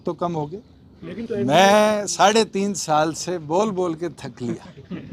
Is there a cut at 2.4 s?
no; 1 cut; at 1.2 s

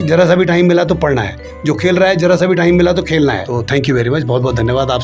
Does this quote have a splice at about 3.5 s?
yes; 1 cut; at 3.5 s

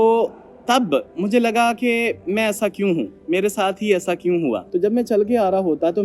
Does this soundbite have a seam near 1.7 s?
no; 1 cut; at 4.7 s

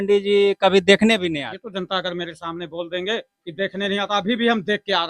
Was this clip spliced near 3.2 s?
no; 1 cut; at 1.6 s

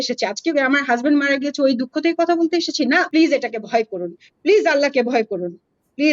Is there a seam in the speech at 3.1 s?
yes; 1 cut; at 3.1 s

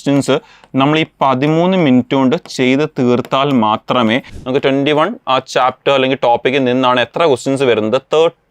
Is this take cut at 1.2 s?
no; 1 cut; at 4.3 s

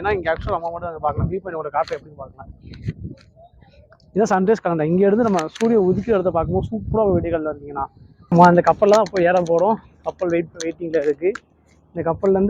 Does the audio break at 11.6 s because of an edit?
no; 1 cut; at 8.3 s

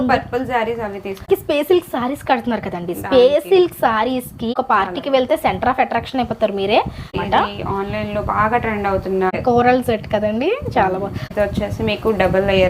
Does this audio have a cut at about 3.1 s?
no; 5 cuts; at 1.3 s, 4.5 s, 7.1 s, 9.3 s, 11.2 s

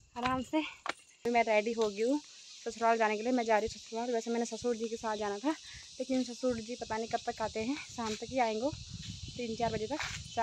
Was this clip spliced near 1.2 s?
yes; 1 cut; at 1.2 s

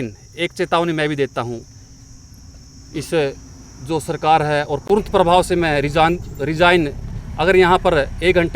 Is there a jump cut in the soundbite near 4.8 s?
yes; 1 cut; at 4.8 s

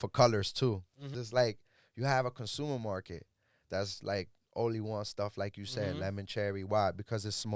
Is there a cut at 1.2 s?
yes; 1 cut; at 1.2 s

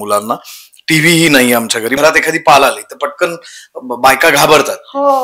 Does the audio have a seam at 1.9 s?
yes; 1 cut; at 1.9 s

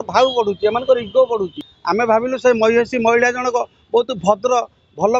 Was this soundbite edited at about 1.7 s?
yes; 1 cut; at 1.7 s

